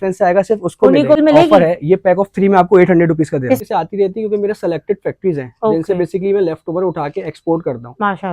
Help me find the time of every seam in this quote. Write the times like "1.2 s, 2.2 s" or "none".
1.2 s, 3.6 s